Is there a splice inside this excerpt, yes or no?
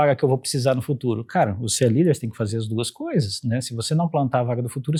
no